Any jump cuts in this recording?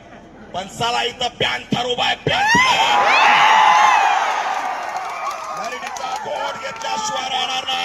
no; 0 cuts

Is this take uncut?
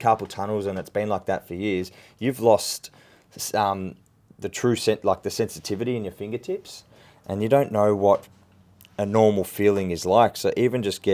yes; 0 cuts

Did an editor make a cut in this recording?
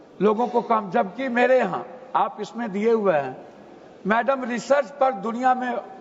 no; 0 cuts

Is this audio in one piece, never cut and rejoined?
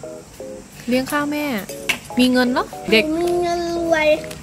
no; 1 cut; at 2.9 s

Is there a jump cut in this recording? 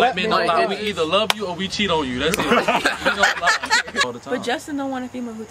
yes; 1 cut; at 4.0 s

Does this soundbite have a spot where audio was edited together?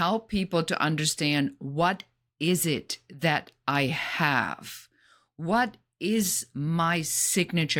no; 0 cuts

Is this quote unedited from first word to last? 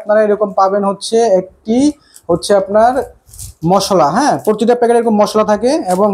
yes; 0 cuts

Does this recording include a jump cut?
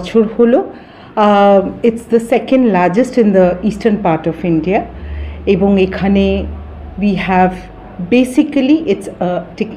no; 0 cuts

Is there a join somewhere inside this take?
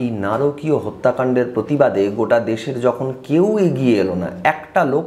no; 0 cuts

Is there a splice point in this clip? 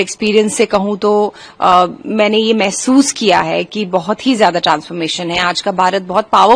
no; 0 cuts

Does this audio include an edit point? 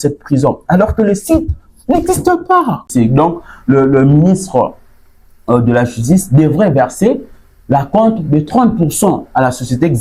yes; 1 cut; at 2.9 s

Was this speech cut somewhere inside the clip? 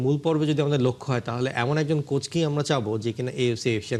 no; 0 cuts

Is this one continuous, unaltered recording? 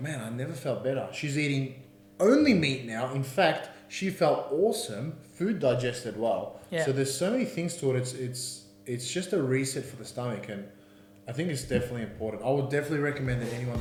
yes; 0 cuts

